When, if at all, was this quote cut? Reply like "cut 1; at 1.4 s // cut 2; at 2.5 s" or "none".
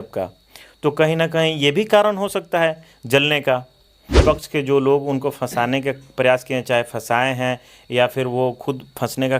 cut 1; at 4.2 s